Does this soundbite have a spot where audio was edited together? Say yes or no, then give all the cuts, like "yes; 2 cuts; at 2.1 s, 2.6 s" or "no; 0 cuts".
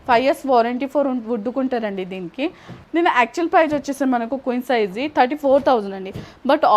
yes; 1 cut; at 2.7 s